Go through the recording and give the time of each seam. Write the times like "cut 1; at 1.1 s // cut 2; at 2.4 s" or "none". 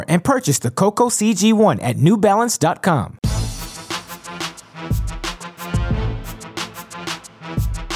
cut 1; at 3.2 s

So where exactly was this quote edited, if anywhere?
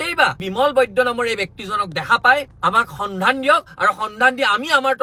none

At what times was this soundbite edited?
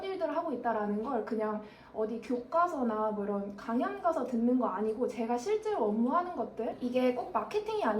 cut 1; at 6.7 s

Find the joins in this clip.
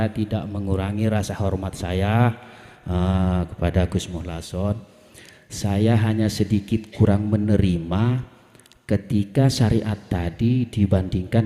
none

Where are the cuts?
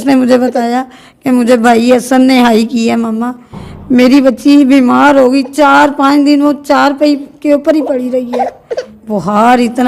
cut 1; at 8.9 s

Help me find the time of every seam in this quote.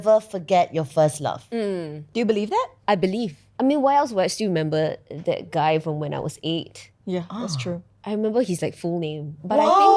none

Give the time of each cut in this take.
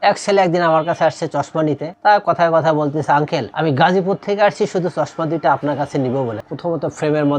cut 1; at 1.9 s // cut 2; at 3.5 s // cut 3; at 6.3 s

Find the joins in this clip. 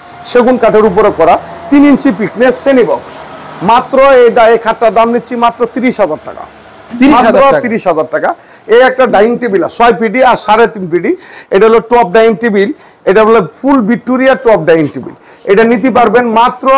none

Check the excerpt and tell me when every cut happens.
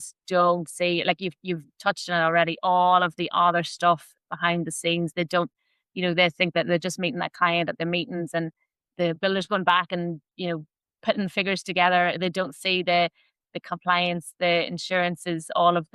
none

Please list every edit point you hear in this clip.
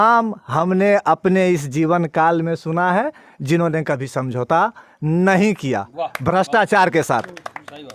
none

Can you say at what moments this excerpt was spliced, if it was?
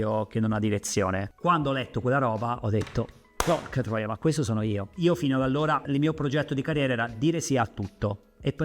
cut 1; at 4.9 s // cut 2; at 5.8 s

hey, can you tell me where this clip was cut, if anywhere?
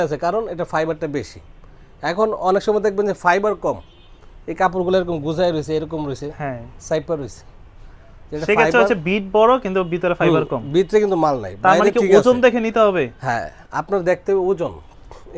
none

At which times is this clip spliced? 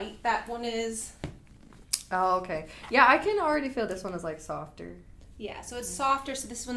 none

